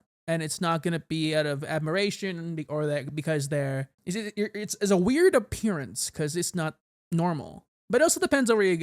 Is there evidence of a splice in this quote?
yes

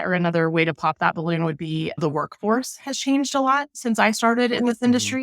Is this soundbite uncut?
no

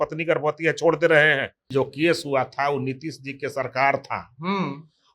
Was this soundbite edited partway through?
yes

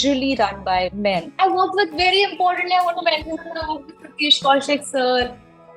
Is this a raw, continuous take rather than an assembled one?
no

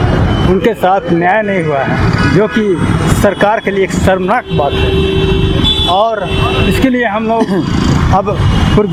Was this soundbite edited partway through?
no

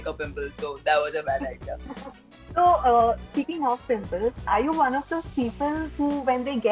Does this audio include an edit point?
no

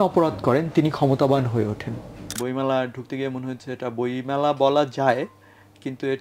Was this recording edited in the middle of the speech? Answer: yes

